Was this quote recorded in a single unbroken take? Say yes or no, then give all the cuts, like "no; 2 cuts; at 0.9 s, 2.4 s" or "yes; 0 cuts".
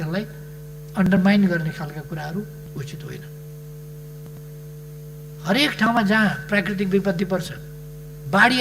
yes; 0 cuts